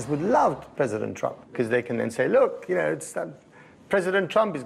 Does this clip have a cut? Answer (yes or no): no